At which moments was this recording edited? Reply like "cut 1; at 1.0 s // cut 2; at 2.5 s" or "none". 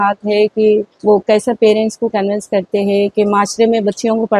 cut 1; at 0.9 s